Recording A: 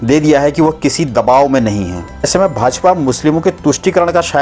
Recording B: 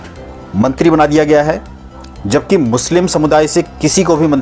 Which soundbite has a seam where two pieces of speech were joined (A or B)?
A